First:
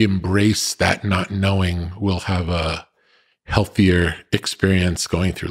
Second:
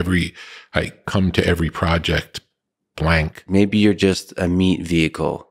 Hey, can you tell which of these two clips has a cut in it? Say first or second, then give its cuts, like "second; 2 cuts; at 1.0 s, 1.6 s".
second; 1 cut; at 3.4 s